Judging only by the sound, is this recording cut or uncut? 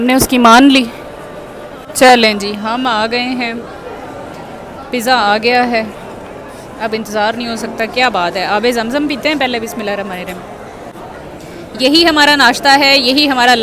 cut